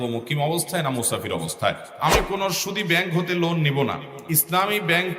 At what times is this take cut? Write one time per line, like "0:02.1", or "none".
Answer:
0:01.9
0:04.1